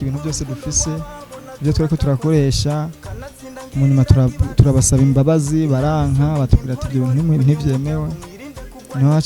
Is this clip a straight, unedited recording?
yes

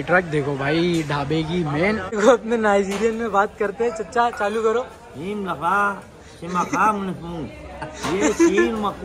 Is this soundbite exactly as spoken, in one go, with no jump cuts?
no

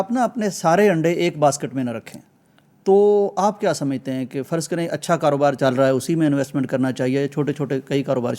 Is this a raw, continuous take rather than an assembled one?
yes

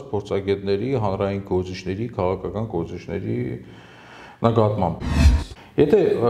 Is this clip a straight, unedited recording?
no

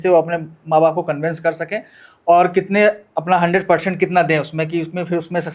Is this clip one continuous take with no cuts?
yes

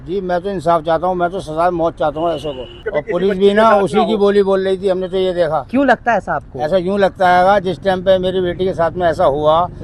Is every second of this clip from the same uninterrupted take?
no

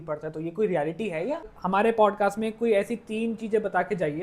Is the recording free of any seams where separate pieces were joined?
no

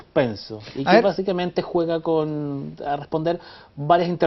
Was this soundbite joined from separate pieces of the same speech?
no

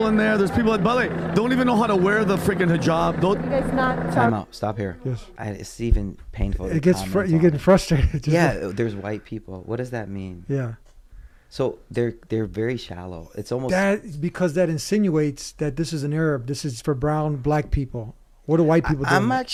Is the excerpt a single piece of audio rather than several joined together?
yes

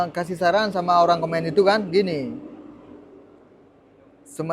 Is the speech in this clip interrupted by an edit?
no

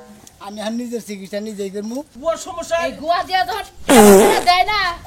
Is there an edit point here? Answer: yes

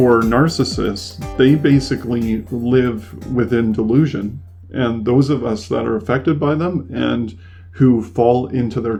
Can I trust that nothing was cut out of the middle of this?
yes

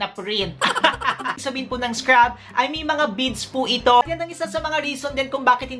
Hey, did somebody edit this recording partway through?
yes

